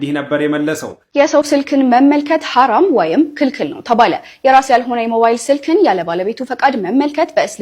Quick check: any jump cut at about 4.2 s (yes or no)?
no